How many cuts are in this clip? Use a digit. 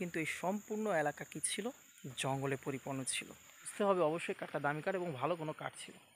1